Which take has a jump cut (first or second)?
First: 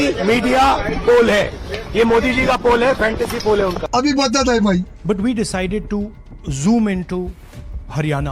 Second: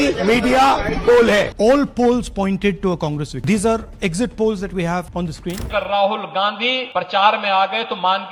second